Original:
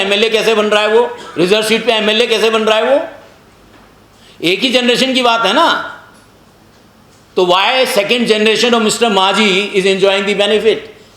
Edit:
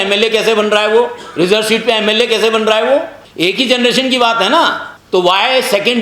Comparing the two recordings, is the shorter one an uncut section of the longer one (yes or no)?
no